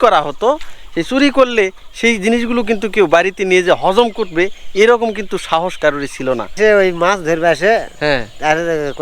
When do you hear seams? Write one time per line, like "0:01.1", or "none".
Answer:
0:06.6